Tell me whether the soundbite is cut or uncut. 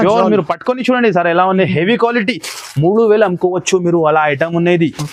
uncut